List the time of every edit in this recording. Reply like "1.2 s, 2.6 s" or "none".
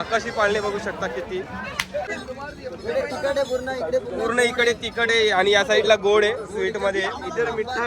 2.1 s